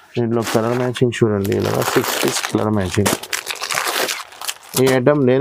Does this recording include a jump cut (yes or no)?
no